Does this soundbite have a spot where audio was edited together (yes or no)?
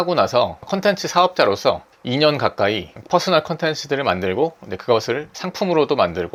no